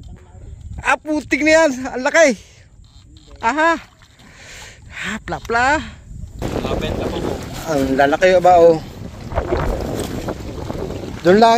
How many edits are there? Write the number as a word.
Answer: one